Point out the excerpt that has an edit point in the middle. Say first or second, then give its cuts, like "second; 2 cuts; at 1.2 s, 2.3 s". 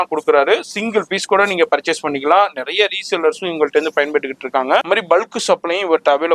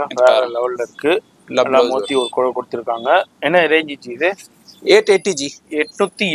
first; 1 cut; at 4.8 s